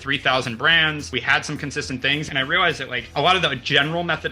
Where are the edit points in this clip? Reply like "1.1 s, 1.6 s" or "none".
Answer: 1.0 s, 2.7 s